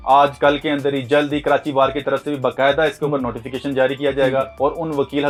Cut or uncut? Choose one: uncut